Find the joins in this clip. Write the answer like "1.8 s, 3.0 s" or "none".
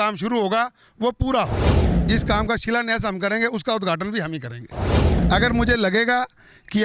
1.8 s, 5.0 s